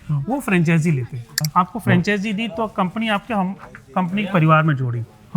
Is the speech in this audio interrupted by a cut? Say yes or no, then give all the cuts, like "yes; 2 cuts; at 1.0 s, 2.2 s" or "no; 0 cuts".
yes; 1 cut; at 1.5 s